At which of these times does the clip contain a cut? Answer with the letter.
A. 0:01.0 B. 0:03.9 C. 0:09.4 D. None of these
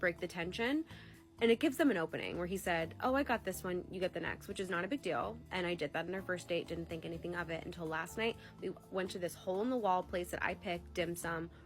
C